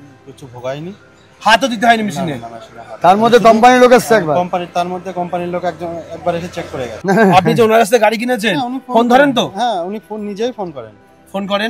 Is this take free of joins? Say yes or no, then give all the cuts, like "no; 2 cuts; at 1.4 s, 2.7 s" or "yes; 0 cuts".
yes; 0 cuts